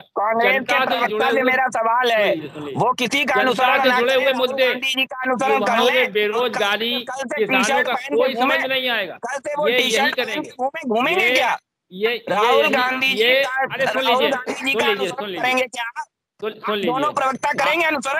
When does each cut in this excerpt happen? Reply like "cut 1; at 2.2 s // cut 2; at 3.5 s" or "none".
none